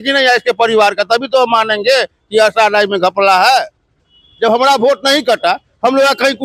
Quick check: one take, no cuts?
yes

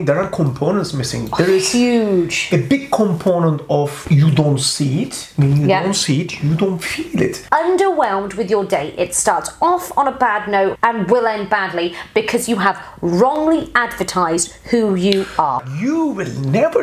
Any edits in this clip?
yes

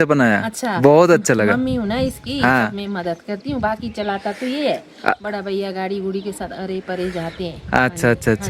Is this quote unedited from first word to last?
yes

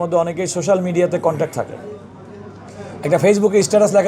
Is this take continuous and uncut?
yes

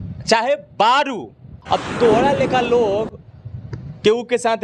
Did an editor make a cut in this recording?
yes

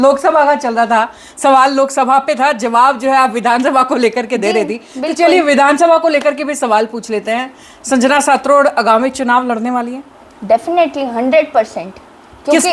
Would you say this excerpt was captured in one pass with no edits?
yes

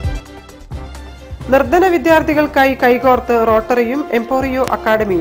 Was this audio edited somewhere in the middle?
no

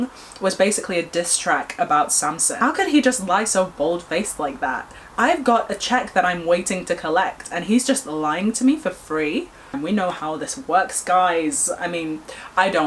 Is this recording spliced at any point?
yes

